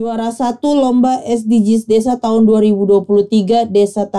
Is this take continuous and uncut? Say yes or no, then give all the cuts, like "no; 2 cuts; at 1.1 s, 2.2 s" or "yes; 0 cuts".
yes; 0 cuts